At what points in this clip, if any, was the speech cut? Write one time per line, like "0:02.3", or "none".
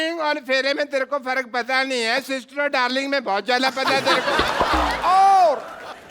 0:04.9

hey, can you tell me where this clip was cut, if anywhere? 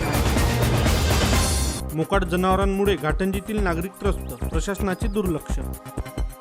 0:01.8

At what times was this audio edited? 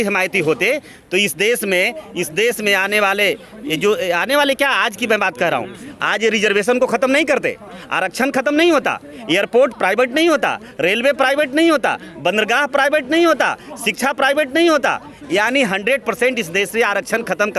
none

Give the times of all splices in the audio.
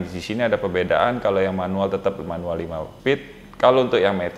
none

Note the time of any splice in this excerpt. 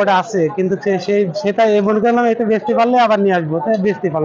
none

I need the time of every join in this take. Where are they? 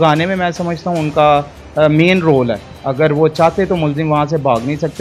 none

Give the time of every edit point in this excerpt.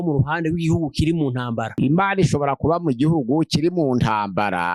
0:01.7

